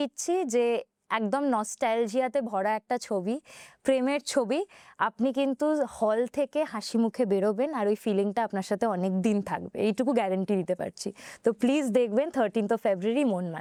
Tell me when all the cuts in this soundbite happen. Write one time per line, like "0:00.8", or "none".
none